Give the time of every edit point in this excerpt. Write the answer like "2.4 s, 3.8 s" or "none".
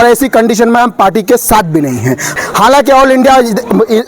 2.4 s